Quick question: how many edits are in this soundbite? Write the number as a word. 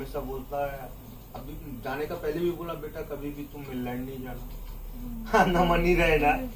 zero